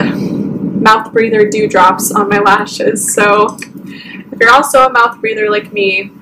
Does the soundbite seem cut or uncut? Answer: uncut